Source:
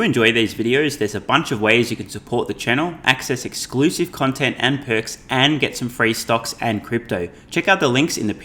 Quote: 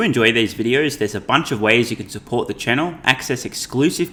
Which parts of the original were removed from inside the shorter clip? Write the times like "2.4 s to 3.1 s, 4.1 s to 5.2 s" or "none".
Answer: none